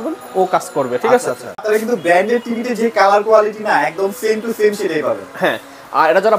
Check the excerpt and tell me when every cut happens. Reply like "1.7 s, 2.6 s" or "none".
1.6 s